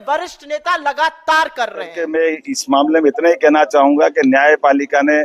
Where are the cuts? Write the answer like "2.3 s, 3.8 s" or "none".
2.0 s